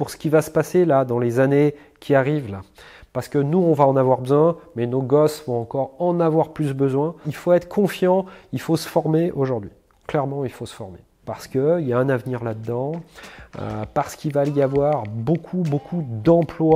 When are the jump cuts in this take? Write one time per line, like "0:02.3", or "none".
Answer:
none